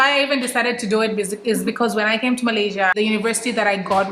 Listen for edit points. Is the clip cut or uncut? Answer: cut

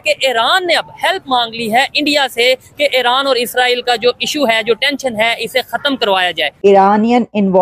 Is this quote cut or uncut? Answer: cut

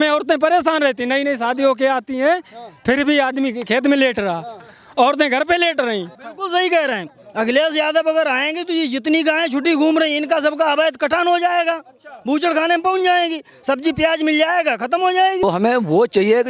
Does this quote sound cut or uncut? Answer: cut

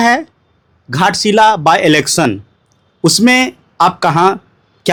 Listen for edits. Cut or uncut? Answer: uncut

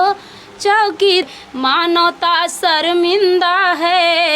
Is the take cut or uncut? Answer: cut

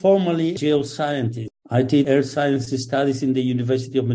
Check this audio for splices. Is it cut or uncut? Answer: cut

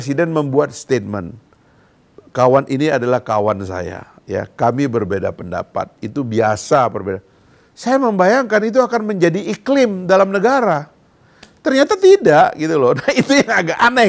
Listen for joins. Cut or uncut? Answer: uncut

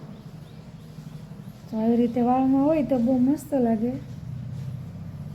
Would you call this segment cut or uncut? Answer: uncut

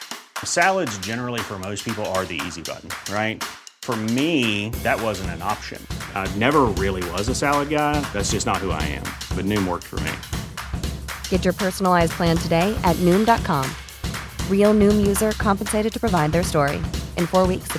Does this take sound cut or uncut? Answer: uncut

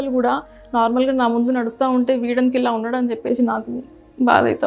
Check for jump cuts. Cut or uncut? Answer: uncut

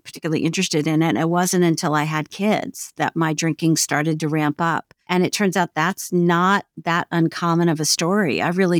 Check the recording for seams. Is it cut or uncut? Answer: cut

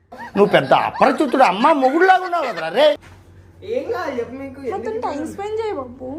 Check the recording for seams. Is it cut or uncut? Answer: cut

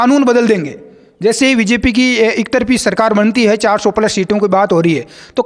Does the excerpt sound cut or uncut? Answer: uncut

